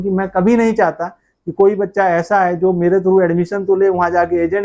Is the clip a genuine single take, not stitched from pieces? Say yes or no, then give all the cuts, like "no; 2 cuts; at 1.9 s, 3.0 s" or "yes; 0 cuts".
yes; 0 cuts